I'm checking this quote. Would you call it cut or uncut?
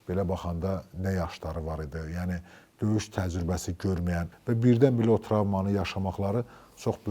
cut